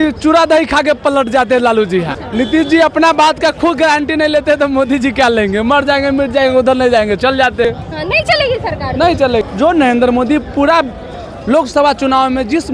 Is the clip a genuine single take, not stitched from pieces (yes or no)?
no